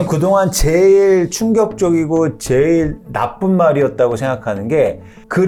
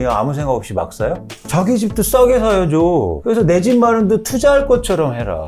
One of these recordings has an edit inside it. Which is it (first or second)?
second